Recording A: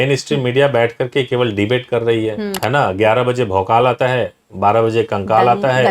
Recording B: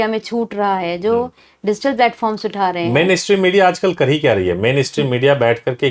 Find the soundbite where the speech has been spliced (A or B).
A